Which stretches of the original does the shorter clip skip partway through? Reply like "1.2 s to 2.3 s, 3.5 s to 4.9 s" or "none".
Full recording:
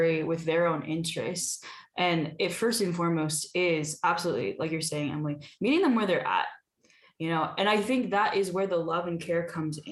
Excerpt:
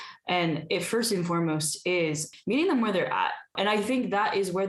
3.9 s to 5.4 s, 6.7 s to 7.5 s